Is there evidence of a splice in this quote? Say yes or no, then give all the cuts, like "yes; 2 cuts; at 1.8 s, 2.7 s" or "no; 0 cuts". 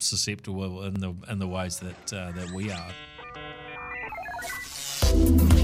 yes; 2 cuts; at 1.0 s, 3.0 s